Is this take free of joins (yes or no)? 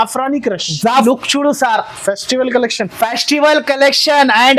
no